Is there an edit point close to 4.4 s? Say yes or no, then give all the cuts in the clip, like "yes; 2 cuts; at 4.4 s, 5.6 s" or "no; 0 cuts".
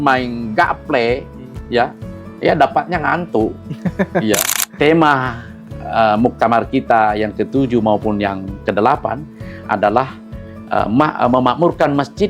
yes; 1 cut; at 4.4 s